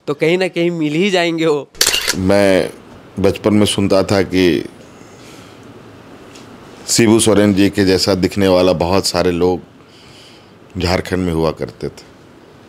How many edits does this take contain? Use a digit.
1